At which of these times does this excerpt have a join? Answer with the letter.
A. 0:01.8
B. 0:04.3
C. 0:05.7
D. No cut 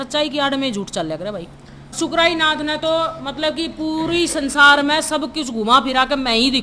A